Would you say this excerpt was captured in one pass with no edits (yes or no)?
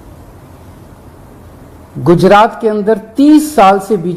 yes